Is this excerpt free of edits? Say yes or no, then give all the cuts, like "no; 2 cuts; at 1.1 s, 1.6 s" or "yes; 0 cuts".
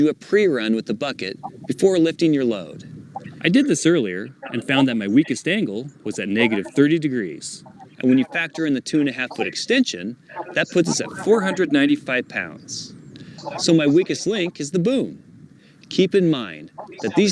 no; 1 cut; at 14.4 s